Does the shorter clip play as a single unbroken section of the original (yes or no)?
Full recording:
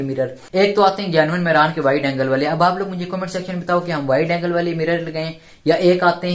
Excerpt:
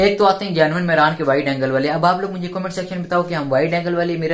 yes